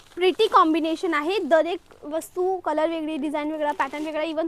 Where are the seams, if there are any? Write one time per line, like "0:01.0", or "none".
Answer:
none